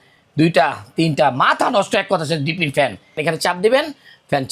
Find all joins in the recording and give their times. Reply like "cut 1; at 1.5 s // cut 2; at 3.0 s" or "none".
cut 1; at 3.2 s